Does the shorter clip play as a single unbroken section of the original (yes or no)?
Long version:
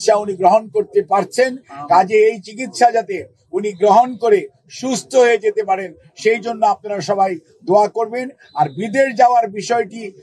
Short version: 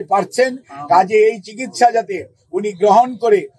yes